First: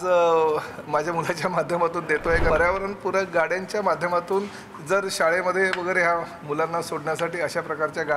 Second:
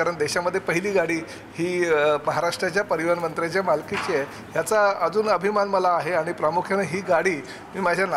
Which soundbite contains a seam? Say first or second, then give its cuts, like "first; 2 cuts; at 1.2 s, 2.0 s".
first; 1 cut; at 2.5 s